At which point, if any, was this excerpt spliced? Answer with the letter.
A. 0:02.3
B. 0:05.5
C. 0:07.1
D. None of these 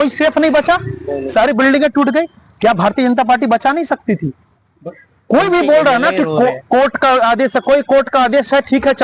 D